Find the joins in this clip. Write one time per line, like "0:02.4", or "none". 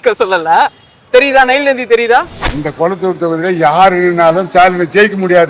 0:02.4